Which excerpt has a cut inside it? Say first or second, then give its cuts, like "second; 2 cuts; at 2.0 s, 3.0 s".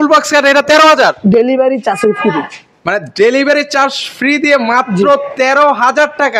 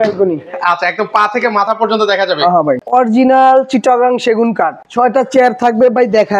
second; 2 cuts; at 2.8 s, 4.8 s